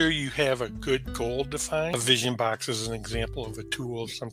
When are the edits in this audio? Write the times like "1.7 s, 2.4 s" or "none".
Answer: 1.9 s